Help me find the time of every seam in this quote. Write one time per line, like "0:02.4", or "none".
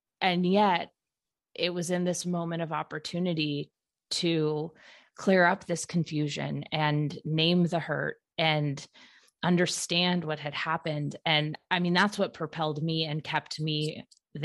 0:11.6